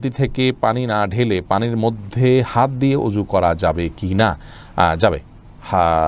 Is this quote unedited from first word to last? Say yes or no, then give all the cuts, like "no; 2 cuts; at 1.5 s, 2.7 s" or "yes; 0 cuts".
yes; 0 cuts